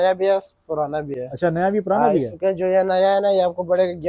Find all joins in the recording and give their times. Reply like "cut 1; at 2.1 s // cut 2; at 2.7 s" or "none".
none